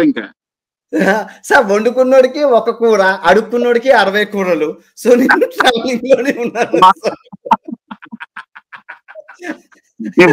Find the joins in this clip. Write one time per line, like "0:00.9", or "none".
none